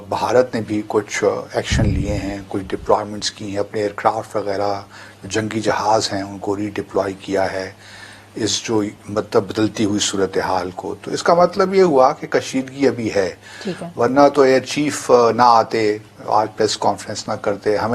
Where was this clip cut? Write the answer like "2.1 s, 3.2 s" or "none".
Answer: none